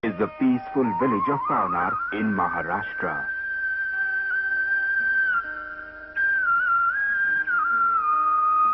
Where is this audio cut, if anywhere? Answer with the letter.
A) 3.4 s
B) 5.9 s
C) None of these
B